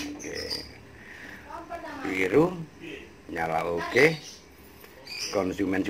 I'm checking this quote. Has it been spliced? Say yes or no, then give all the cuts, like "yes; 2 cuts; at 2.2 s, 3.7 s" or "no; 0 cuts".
no; 0 cuts